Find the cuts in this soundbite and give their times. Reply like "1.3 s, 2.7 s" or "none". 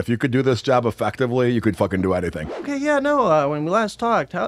2.6 s